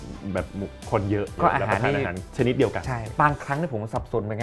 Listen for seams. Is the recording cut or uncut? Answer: cut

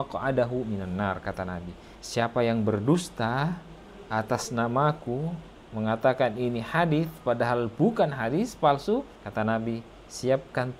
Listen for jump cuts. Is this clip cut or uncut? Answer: uncut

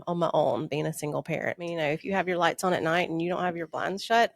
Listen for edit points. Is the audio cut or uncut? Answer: cut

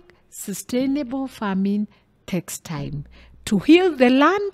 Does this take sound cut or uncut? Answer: uncut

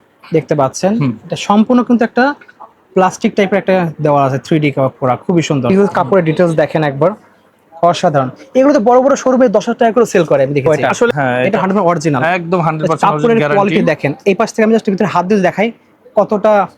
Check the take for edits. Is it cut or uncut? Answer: cut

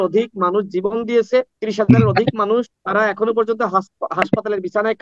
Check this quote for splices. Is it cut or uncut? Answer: cut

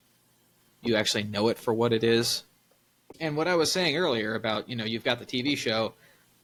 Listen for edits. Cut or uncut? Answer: uncut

